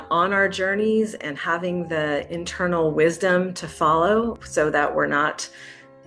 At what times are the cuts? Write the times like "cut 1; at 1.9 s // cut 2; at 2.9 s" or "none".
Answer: cut 1; at 4.4 s

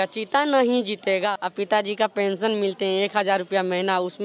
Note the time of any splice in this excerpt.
cut 1; at 1.4 s

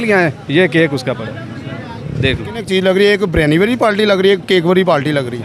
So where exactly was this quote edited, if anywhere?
cut 1; at 2.6 s

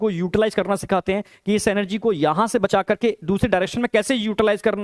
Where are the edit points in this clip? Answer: none

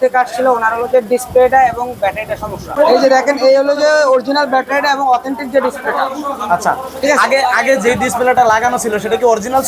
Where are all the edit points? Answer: cut 1; at 2.7 s

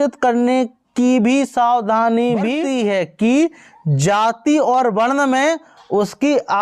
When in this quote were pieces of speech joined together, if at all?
cut 1; at 2.6 s

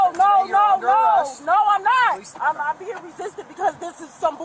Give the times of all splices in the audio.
cut 1; at 2.3 s

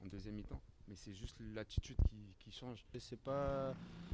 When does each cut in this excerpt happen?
cut 1; at 2.8 s

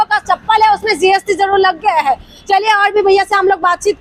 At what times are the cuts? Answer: none

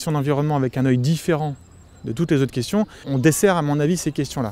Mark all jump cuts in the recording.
cut 1; at 3.0 s

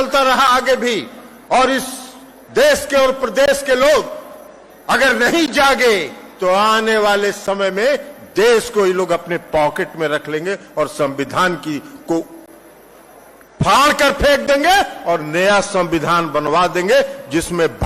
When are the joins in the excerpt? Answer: none

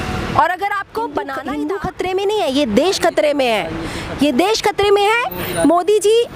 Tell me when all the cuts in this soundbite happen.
cut 1; at 1.3 s

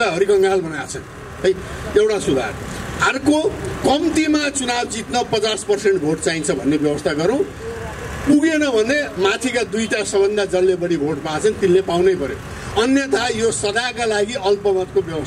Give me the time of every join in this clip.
none

